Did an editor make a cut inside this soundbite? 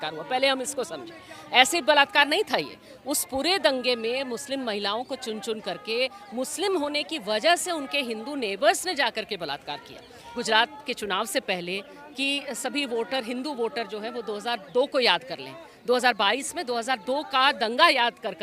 yes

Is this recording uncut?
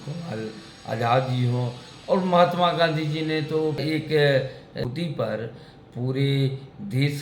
no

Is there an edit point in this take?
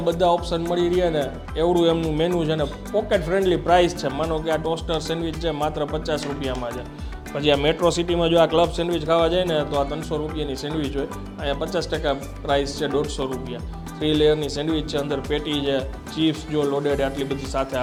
no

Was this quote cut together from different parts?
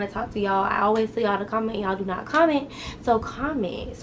no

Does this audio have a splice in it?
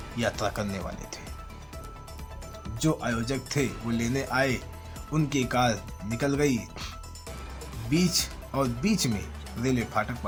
no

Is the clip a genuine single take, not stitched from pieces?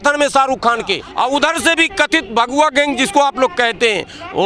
no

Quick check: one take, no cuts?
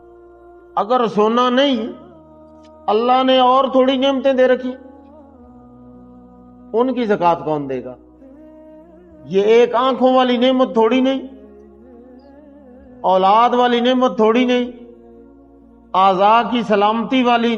no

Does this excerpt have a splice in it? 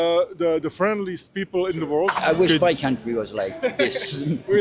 yes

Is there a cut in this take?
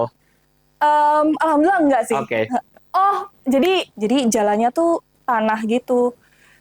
yes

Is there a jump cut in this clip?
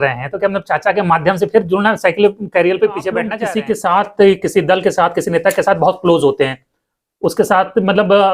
yes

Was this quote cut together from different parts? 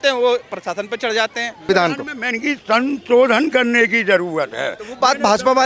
yes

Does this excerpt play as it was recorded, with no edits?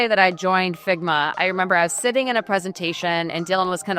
yes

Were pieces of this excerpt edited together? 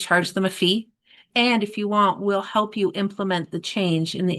yes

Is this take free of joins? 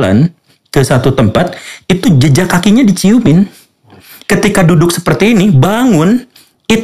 yes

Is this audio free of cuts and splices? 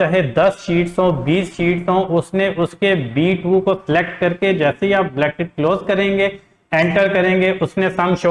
yes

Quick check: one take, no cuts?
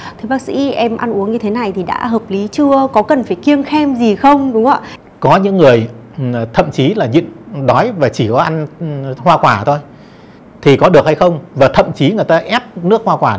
no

